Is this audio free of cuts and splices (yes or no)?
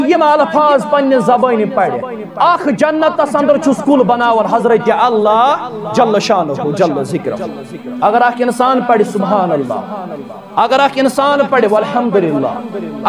yes